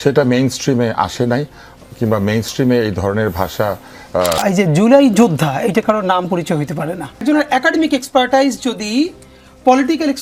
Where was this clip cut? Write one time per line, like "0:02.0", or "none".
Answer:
0:04.4
0:07.2